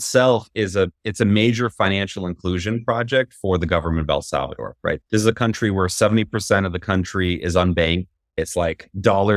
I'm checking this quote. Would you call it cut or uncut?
uncut